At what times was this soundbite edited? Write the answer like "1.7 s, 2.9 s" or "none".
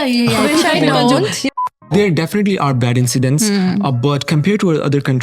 1.9 s